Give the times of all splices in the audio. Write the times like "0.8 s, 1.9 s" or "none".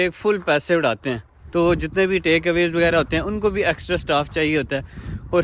none